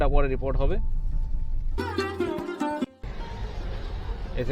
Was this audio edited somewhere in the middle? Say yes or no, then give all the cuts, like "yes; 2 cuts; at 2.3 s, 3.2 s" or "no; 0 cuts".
yes; 1 cut; at 1.8 s